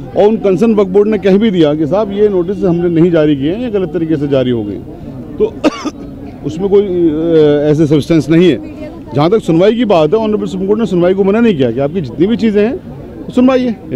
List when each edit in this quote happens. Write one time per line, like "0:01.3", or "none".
none